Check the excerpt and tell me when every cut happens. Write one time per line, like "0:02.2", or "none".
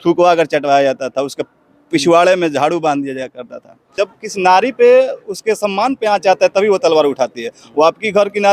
0:03.8